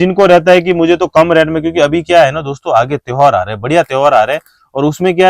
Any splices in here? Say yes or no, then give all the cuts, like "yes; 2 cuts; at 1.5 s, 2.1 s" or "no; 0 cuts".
no; 0 cuts